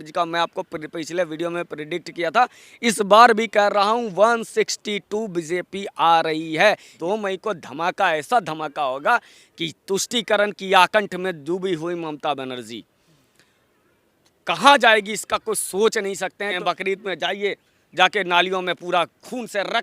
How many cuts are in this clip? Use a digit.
2